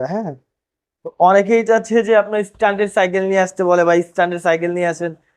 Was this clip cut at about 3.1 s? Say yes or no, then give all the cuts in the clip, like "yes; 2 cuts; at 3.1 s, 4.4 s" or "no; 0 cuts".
no; 1 cut; at 1.0 s